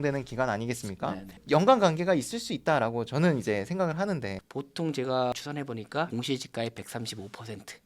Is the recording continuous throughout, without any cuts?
no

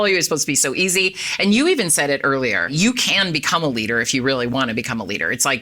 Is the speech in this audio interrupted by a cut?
no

